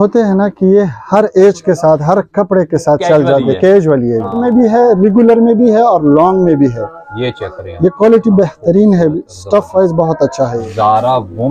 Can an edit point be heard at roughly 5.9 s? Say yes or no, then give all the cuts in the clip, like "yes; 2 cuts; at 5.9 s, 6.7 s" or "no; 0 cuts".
no; 2 cuts; at 4.4 s, 10.5 s